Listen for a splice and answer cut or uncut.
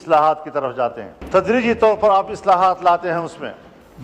cut